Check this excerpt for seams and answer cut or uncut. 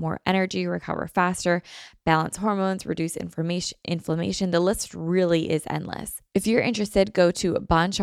cut